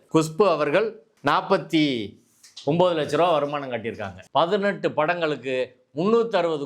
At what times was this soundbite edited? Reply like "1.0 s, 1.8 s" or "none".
1.1 s, 4.1 s